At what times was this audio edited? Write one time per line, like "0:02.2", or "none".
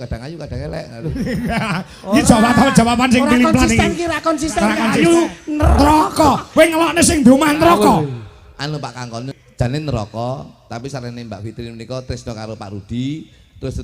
0:04.8
0:09.7